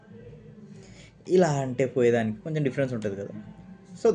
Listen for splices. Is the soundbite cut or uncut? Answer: uncut